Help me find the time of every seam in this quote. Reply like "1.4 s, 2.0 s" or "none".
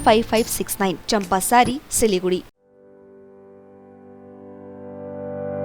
none